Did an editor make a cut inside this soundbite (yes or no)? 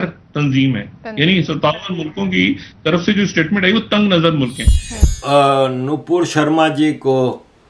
yes